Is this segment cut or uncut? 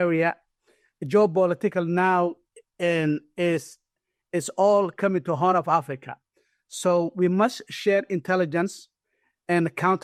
uncut